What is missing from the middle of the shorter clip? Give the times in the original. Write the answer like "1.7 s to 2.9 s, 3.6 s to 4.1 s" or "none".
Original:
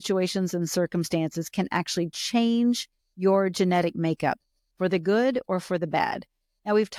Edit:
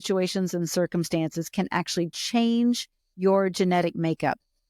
none